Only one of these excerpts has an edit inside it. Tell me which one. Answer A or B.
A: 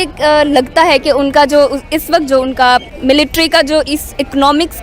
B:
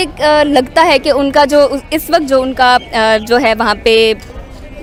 A